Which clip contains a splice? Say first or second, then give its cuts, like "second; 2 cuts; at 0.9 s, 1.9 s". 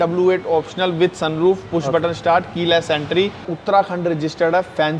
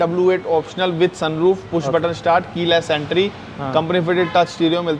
first; 1 cut; at 3.5 s